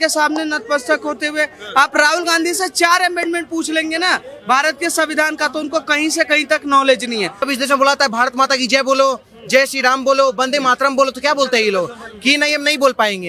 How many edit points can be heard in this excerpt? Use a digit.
1